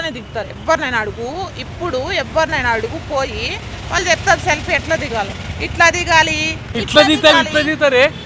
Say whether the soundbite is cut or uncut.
uncut